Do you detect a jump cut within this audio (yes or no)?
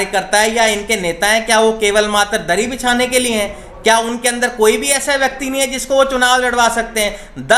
no